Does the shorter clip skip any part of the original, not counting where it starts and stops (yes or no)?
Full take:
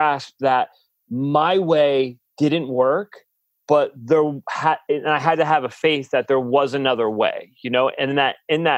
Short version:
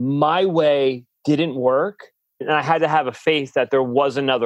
yes